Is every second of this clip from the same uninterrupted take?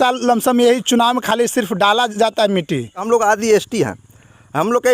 no; 1 cut; at 3.0 s

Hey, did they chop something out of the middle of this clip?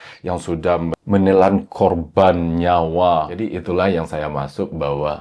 yes; 1 cut; at 3.5 s

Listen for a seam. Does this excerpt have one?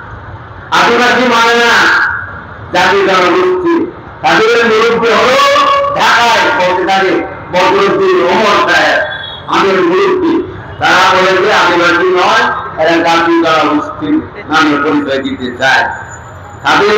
no; 0 cuts

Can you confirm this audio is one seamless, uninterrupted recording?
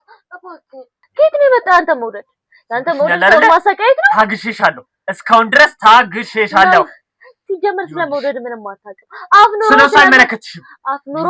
no; 1 cut; at 1.0 s

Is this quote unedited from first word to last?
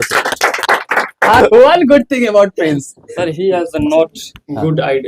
no; 1 cut; at 1.4 s

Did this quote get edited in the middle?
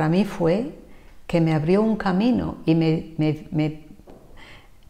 no; 0 cuts

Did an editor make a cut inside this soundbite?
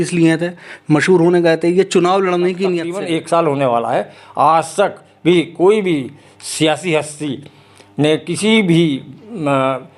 yes; 1 cut; at 2.9 s

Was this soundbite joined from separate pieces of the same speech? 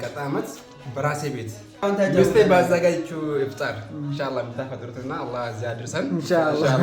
yes; 1 cut; at 1.8 s

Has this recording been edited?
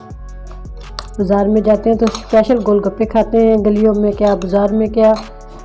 no; 0 cuts

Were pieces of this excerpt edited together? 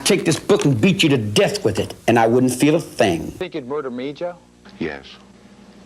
yes; 1 cut; at 3.5 s

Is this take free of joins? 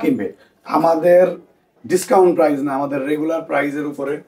yes; 0 cuts

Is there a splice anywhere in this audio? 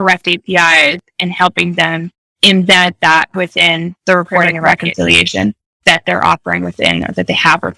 yes; 2 cuts; at 4.8 s, 5.8 s

